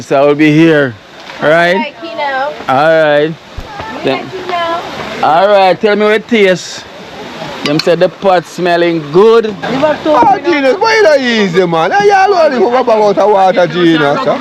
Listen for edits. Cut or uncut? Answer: cut